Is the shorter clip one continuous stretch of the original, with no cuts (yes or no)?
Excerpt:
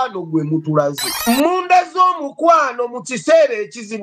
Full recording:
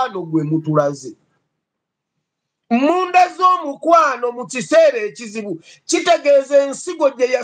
no